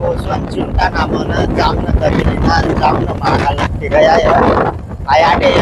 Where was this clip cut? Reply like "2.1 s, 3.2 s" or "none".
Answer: none